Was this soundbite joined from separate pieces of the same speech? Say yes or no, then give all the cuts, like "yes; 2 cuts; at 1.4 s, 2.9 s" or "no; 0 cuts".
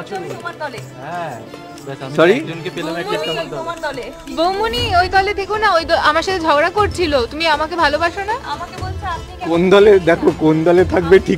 no; 0 cuts